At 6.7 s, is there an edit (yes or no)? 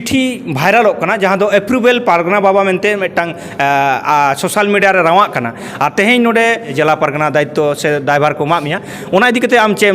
yes